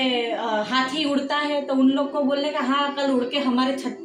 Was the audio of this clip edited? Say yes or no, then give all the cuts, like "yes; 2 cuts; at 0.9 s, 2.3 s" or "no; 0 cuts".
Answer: no; 0 cuts